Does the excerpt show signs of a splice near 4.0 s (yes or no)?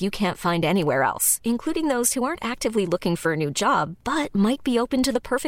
no